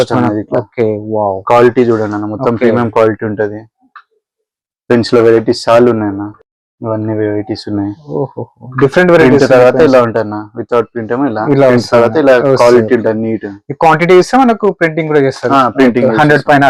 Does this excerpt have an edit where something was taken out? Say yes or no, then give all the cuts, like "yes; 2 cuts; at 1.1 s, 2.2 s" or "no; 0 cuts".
no; 0 cuts